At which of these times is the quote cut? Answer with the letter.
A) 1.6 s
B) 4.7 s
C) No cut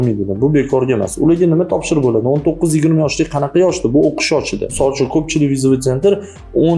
B